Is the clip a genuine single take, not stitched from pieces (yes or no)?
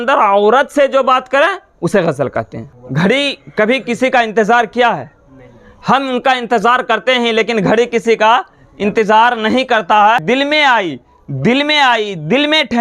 no